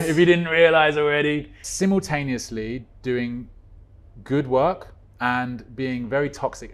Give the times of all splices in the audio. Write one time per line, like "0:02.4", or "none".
0:01.6